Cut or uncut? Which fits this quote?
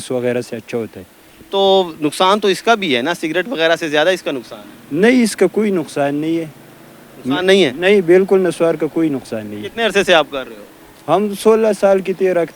uncut